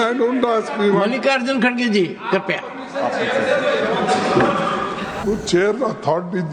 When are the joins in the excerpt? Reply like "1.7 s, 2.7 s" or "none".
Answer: 5.2 s